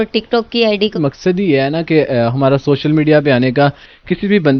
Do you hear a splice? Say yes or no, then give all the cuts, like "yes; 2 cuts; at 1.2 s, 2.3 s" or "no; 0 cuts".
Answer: yes; 1 cut; at 1.0 s